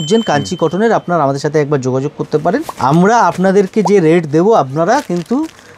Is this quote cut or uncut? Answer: cut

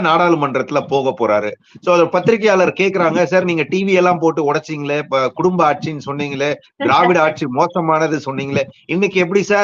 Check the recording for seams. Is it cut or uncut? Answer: uncut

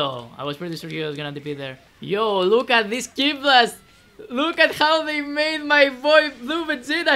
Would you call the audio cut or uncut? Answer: cut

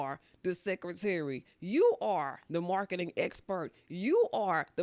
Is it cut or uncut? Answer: uncut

